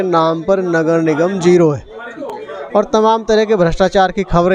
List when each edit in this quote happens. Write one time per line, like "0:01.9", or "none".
none